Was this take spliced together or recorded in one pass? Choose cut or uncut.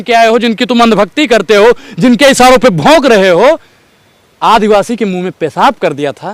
uncut